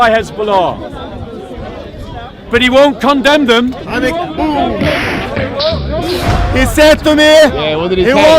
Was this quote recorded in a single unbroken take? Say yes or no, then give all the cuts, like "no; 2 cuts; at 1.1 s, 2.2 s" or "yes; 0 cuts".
no; 1 cut; at 6.3 s